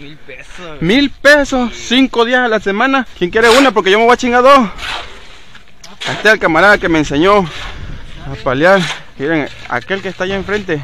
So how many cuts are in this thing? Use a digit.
2